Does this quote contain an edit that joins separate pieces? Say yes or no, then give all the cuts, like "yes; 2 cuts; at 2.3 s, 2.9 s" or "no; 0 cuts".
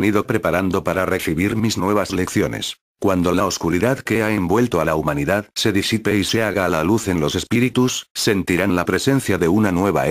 yes; 1 cut; at 8.4 s